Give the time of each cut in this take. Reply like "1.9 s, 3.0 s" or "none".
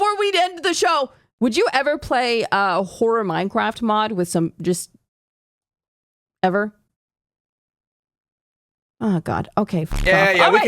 1.3 s